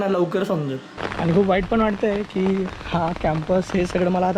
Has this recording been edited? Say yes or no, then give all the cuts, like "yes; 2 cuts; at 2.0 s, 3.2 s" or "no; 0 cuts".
yes; 1 cut; at 1.1 s